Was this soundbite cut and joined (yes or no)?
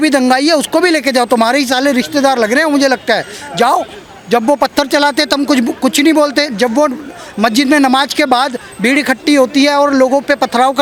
no